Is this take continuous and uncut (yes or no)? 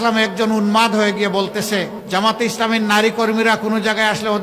no